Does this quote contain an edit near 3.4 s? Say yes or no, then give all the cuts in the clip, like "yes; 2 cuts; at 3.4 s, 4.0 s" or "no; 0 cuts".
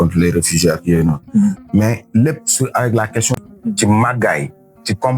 yes; 1 cut; at 3.4 s